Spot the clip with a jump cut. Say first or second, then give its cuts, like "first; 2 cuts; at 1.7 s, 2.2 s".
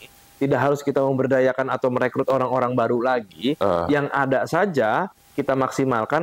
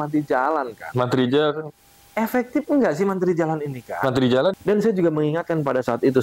second; 1 cut; at 4.6 s